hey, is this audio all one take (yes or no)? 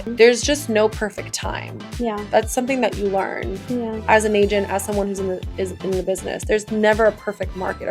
yes